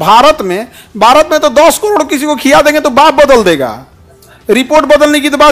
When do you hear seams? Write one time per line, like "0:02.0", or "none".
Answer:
none